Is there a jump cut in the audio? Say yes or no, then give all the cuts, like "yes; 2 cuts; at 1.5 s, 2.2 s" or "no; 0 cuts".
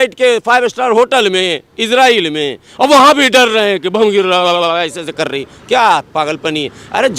no; 0 cuts